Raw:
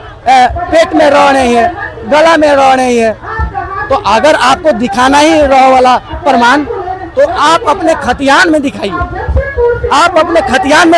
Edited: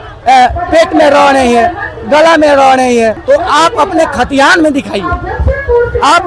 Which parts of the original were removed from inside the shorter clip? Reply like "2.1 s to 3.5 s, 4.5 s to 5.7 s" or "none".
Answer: 3.2 s to 7.1 s

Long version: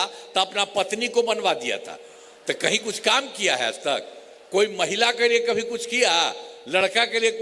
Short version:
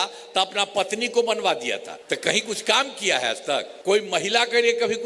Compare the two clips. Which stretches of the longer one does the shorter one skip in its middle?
1.9 s to 2.3 s, 4.1 s to 4.4 s

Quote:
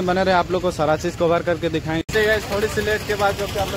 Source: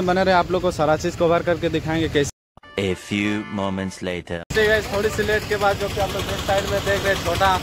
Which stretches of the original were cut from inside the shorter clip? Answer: 2.0 s to 4.4 s

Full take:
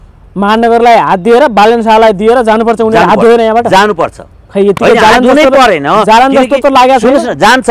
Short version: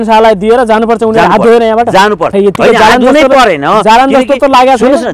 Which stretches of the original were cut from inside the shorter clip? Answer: 4.0 s to 4.5 s

